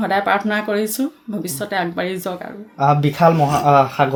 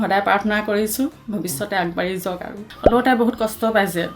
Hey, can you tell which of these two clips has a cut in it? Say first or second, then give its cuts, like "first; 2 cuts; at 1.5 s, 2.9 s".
second; 1 cut; at 2.6 s